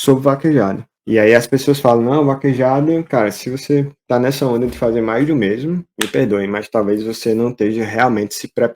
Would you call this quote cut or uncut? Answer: cut